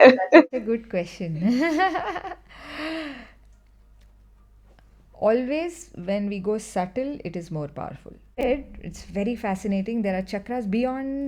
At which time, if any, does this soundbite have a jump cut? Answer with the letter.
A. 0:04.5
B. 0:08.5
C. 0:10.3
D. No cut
B